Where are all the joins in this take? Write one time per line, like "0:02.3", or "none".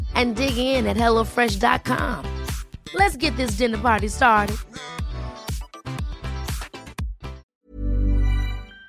0:07.5